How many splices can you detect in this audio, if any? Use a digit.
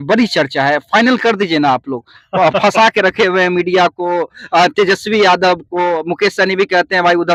0